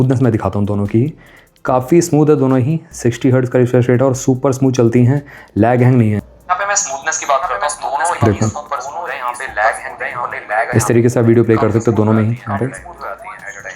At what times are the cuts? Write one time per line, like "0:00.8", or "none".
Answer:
0:06.2